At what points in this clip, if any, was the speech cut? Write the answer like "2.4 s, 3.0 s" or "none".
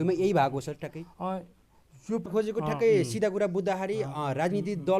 2.3 s